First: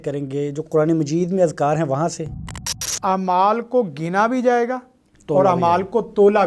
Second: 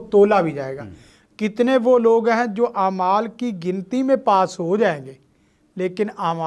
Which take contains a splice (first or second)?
first